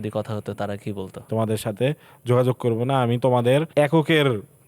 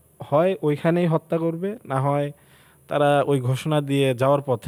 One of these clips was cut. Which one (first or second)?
first